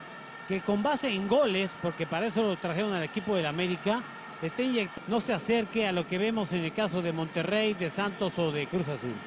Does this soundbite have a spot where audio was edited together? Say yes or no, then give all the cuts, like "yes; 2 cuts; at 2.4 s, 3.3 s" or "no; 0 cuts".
yes; 1 cut; at 6.4 s